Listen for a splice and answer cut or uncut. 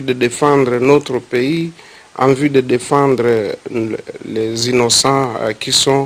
cut